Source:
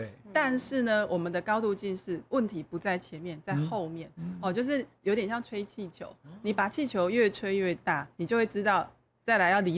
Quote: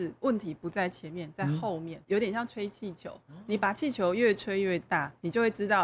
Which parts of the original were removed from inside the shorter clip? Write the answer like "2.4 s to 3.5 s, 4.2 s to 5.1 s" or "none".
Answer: 4.1 s to 4.9 s